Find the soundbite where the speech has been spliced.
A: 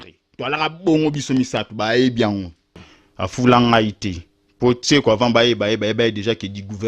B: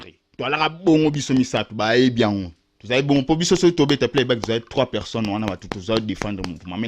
A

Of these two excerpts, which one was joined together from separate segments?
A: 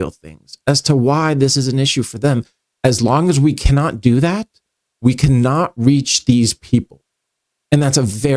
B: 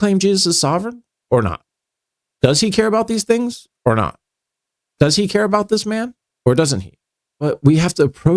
B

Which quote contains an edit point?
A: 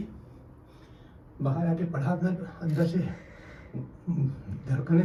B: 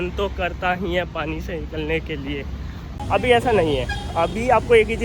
B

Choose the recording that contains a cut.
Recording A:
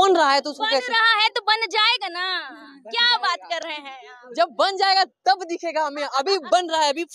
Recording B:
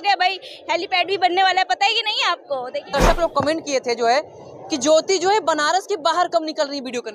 B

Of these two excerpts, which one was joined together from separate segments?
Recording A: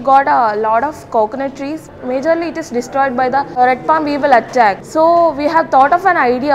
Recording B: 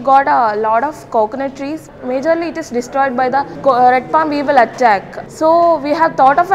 A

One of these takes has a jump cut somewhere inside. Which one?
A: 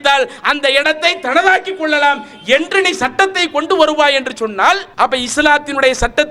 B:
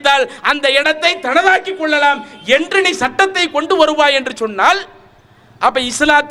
A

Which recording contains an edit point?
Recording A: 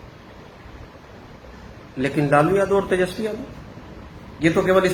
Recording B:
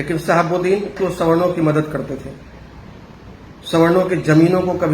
B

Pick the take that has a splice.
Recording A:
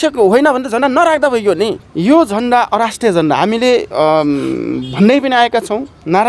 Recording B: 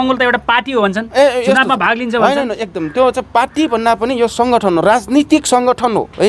A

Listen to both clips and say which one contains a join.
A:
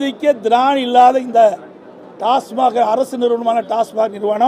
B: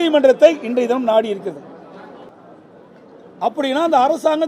B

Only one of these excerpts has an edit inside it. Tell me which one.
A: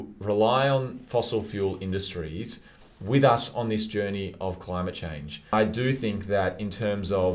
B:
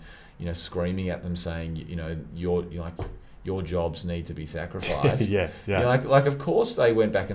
A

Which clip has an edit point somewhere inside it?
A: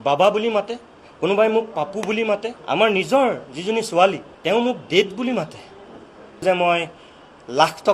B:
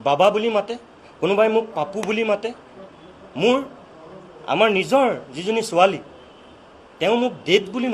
A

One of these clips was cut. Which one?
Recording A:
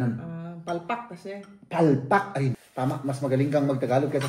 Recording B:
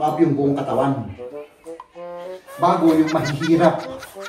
A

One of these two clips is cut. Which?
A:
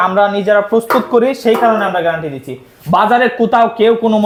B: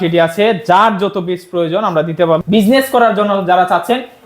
B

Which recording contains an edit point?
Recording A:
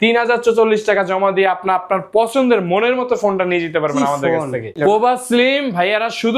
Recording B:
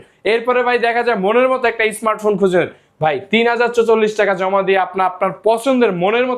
A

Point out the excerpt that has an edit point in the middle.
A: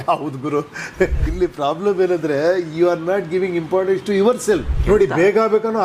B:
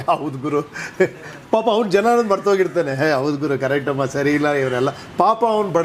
A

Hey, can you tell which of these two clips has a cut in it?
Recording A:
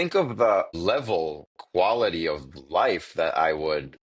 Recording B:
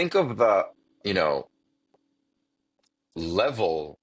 A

